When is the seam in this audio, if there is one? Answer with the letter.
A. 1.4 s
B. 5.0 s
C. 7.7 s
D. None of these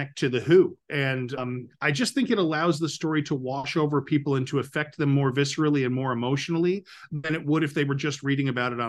A